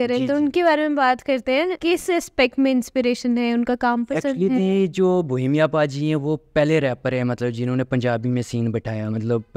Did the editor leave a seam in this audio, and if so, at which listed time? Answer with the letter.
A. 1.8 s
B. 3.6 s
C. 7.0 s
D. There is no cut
A